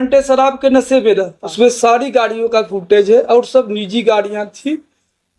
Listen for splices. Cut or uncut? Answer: cut